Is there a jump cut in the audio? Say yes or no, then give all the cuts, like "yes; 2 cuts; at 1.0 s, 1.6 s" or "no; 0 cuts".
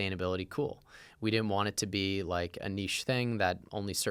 no; 0 cuts